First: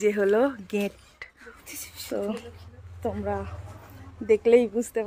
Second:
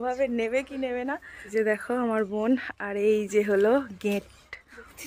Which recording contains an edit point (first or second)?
second